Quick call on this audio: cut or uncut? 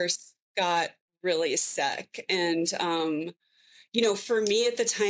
uncut